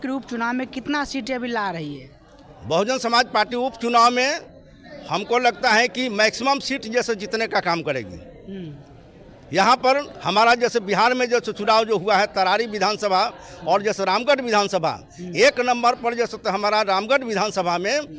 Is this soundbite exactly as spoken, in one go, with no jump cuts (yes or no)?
yes